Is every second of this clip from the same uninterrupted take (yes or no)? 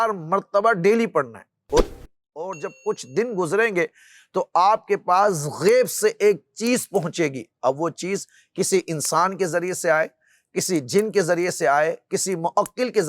no